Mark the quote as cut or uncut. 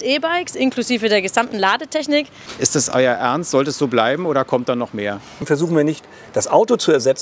cut